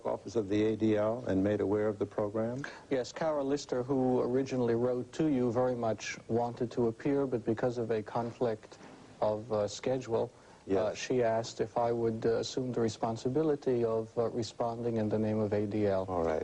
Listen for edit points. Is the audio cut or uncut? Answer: cut